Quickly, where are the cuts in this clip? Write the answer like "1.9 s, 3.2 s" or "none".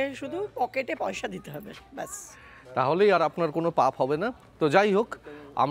none